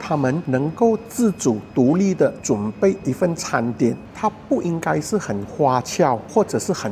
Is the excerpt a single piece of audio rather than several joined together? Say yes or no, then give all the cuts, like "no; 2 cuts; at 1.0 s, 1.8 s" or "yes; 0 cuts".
yes; 0 cuts